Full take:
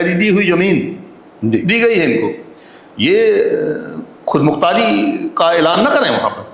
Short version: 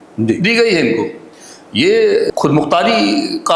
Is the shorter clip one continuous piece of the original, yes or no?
no